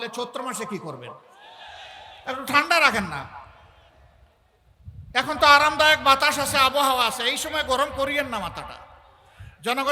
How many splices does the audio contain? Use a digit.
0